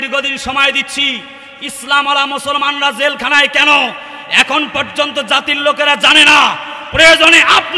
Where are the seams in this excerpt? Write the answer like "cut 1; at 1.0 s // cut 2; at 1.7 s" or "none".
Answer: none